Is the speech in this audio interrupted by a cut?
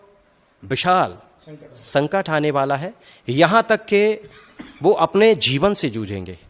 no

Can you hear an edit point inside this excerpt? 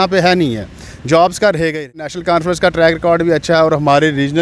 yes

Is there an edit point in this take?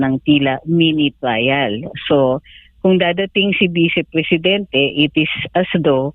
no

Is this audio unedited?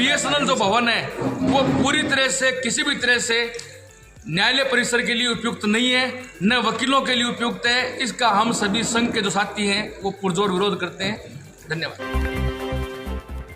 no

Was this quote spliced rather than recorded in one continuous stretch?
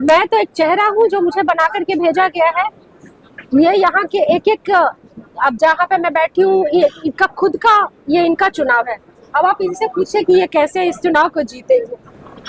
no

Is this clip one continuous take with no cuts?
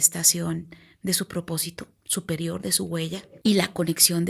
no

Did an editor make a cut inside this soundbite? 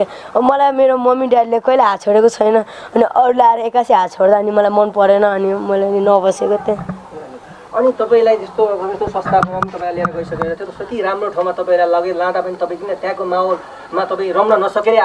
no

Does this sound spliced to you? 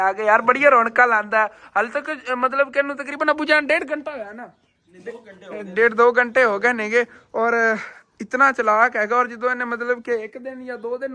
no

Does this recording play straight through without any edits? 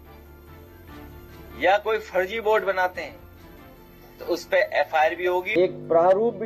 no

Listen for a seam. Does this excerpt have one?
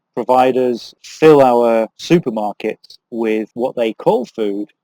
yes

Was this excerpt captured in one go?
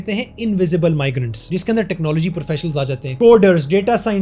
no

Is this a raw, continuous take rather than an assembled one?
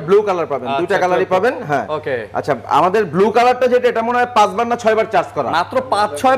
yes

